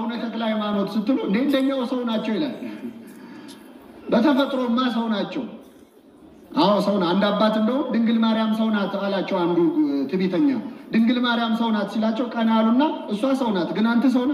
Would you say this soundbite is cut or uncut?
uncut